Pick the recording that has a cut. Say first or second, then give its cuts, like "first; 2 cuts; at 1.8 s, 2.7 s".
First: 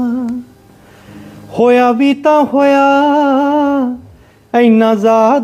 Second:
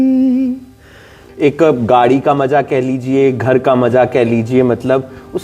second; 1 cut; at 1.2 s